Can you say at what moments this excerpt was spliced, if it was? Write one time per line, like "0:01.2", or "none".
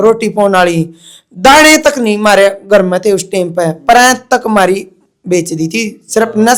none

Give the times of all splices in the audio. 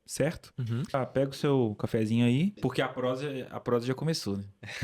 0:00.9
0:02.6

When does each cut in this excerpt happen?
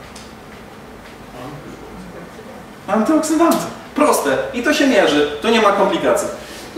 none

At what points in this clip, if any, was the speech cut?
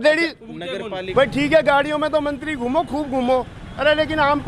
0:01.0

